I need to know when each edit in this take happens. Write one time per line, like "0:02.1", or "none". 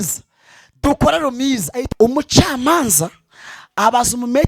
0:01.8